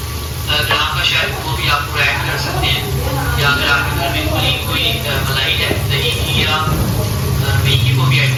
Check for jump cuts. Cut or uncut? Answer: uncut